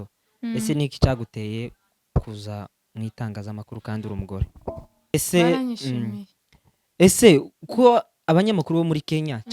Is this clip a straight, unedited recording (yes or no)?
no